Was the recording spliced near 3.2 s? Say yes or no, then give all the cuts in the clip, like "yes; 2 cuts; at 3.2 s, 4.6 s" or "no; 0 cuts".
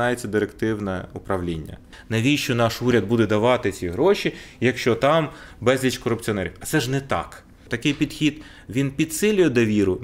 no; 2 cuts; at 2.0 s, 7.7 s